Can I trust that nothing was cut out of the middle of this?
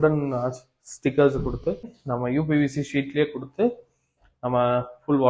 no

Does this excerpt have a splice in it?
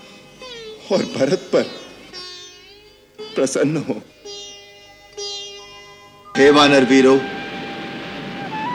yes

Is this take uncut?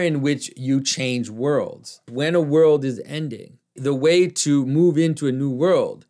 no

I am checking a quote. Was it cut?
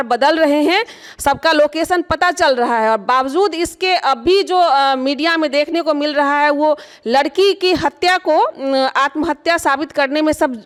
no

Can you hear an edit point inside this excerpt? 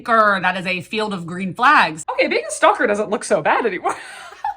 yes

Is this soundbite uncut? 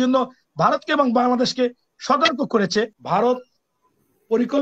no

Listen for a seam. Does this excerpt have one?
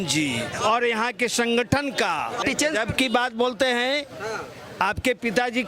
yes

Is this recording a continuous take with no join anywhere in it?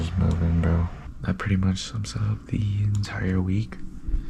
no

